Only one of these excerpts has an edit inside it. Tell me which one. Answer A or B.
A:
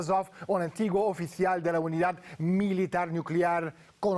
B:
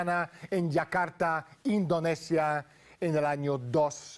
B